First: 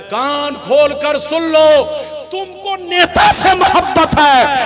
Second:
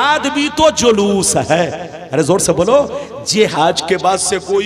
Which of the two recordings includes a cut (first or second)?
second